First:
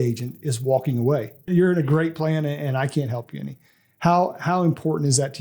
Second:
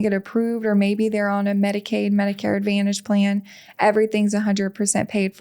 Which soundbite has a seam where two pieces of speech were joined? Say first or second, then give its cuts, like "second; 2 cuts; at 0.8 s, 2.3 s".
first; 1 cut; at 1.5 s